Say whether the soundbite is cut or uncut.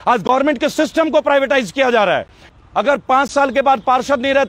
cut